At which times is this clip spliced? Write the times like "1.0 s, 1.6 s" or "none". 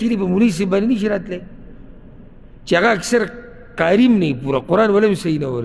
none